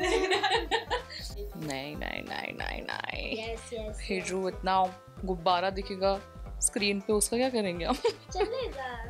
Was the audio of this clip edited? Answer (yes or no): yes